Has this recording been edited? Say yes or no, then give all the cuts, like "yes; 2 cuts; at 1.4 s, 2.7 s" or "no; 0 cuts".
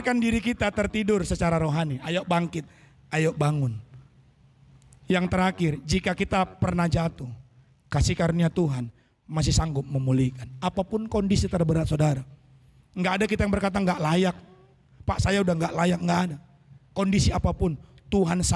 no; 0 cuts